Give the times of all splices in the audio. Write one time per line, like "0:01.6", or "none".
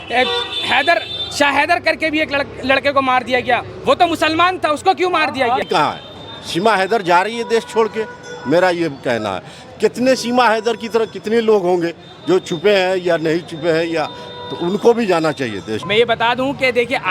0:05.6
0:15.7